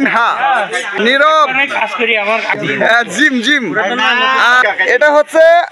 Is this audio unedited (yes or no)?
no